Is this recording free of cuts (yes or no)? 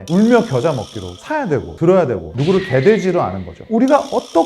no